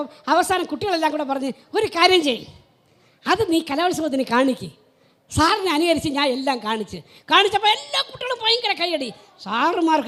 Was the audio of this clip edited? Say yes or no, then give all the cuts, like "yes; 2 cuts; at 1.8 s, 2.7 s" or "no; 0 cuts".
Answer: no; 0 cuts